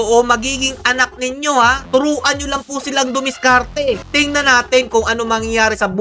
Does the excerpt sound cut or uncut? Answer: cut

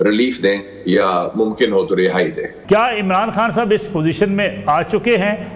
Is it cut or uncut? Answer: cut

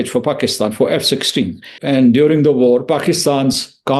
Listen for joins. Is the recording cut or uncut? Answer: cut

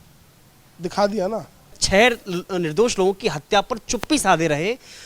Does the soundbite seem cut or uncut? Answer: cut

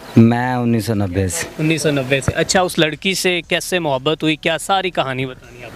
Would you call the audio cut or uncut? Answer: uncut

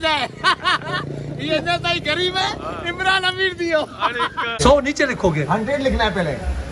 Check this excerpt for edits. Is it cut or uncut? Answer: cut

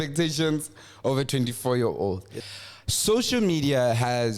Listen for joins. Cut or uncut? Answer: cut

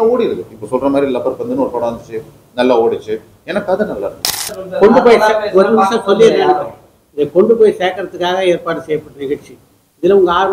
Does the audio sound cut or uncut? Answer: cut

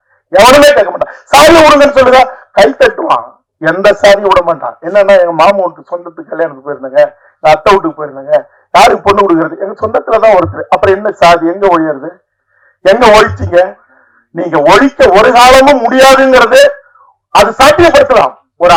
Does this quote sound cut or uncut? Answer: uncut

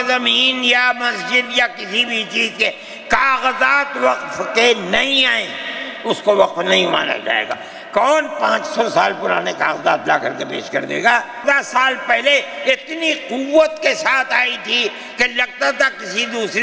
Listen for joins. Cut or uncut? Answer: cut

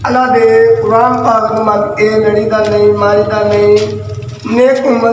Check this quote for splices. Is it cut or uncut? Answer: uncut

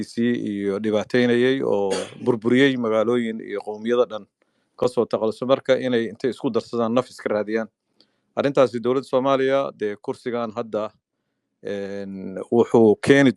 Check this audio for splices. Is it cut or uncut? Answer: uncut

